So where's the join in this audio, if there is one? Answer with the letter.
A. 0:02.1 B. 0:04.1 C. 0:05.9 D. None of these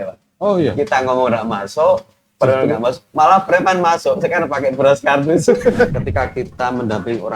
C